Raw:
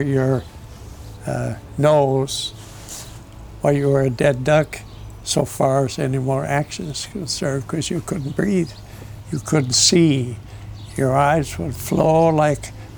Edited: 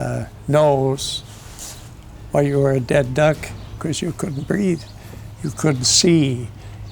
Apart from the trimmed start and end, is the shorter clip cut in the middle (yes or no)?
yes